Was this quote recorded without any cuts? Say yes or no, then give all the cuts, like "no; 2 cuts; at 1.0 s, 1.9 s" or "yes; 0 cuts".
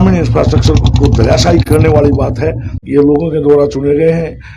no; 1 cut; at 2.8 s